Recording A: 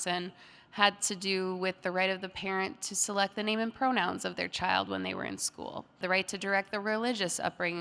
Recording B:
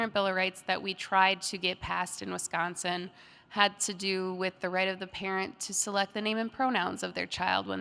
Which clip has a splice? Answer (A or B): A